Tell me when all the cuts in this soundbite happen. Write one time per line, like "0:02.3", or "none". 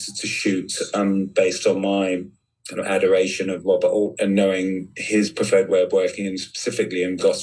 none

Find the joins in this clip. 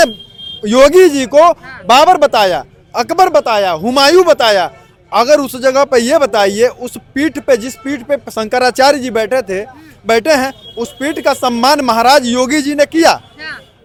none

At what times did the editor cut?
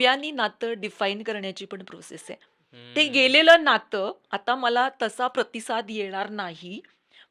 none

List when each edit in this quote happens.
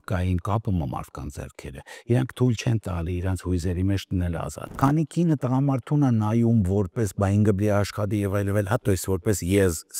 0:04.6

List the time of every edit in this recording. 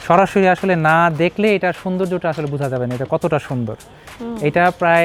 none

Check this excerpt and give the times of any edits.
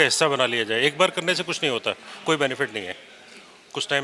none

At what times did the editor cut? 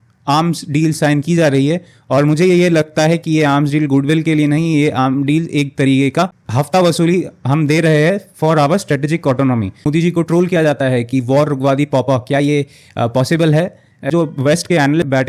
0:09.8
0:14.1

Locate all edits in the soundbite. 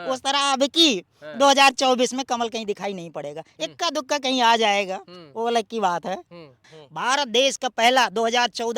0:06.6

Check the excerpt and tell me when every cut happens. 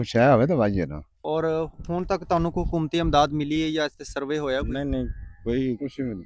0:01.1

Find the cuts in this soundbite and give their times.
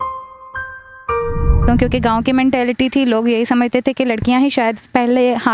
0:01.6

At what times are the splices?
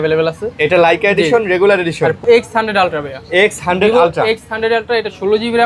0:02.2

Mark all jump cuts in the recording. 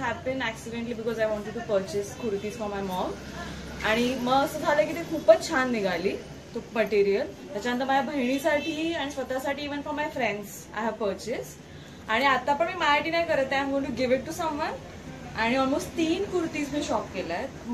none

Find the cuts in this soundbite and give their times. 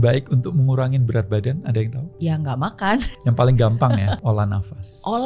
0:02.0
0:03.1
0:04.2

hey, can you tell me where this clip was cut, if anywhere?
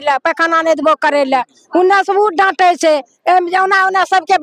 none

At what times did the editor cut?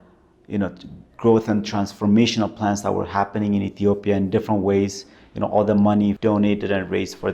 0:06.2

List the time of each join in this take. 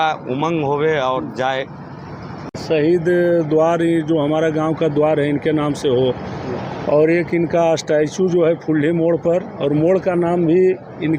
0:02.6

